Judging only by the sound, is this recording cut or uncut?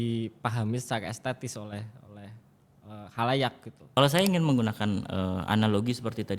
cut